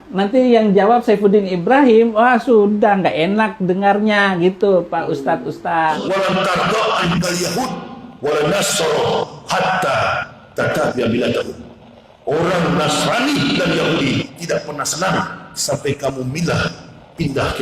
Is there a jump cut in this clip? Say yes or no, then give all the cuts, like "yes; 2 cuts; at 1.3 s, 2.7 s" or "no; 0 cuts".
yes; 1 cut; at 5.9 s